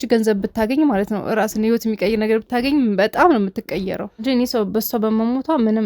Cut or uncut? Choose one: cut